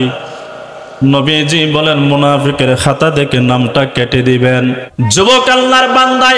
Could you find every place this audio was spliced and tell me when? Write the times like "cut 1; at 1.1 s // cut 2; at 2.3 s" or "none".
cut 1; at 4.9 s